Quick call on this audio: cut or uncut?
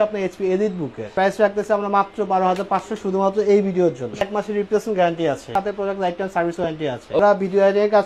cut